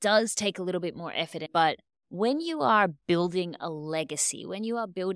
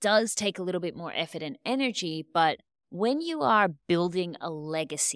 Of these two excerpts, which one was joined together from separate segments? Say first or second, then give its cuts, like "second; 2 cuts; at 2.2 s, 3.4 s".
first; 1 cut; at 1.4 s